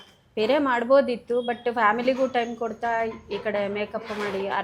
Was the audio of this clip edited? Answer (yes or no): no